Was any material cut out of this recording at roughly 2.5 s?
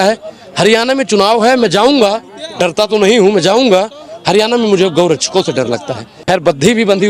no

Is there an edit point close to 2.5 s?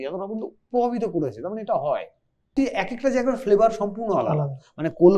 yes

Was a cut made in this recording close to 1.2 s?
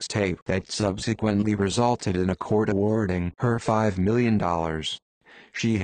no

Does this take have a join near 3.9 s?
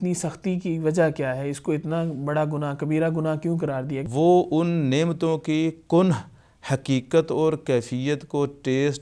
yes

